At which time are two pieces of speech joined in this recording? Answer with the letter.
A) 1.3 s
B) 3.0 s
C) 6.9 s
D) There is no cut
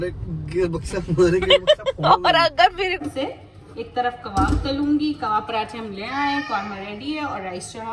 B